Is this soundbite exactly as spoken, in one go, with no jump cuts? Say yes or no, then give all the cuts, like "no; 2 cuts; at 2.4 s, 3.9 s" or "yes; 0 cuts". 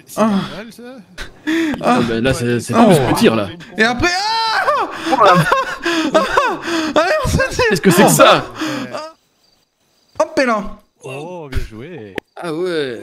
no; 1 cut; at 8.9 s